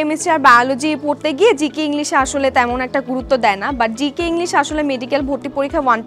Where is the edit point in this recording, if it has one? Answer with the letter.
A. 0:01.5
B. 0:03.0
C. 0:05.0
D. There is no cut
D